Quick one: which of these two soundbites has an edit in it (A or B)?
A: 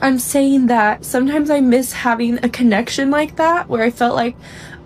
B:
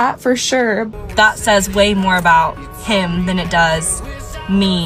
B